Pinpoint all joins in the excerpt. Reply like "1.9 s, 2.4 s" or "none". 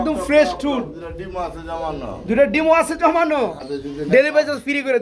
3.6 s